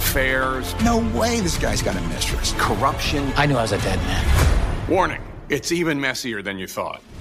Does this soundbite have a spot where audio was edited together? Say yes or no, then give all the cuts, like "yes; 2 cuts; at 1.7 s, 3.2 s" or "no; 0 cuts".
no; 0 cuts